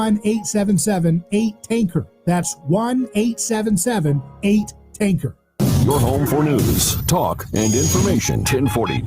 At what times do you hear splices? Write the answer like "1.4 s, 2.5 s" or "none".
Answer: 5.3 s